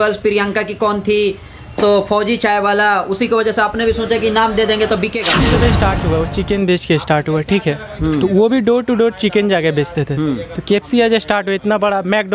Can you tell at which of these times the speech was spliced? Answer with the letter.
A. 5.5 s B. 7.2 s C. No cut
A